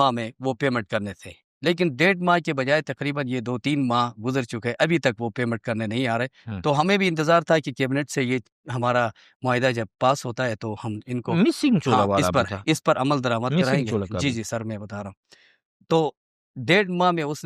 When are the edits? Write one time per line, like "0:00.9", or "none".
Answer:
none